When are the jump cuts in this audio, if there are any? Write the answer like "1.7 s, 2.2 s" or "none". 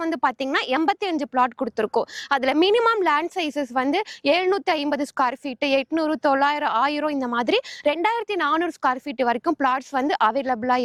none